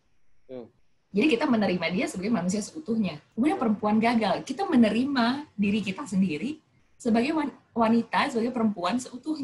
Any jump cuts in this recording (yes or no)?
yes